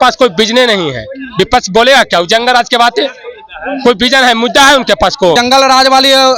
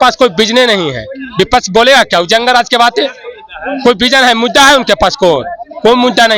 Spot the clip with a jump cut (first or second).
first